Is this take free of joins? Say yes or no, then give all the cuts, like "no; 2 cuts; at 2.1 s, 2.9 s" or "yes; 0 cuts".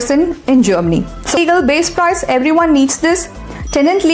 no; 1 cut; at 1.4 s